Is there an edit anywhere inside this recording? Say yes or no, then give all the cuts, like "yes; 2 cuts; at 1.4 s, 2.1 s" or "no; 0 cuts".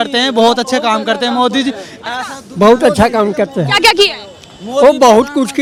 no; 0 cuts